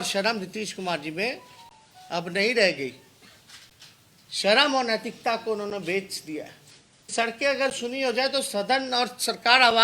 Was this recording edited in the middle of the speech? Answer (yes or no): yes